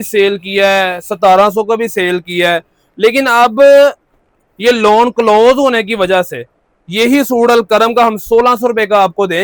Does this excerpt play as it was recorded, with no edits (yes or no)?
yes